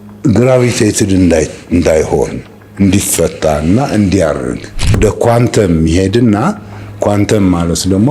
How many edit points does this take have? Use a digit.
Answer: 1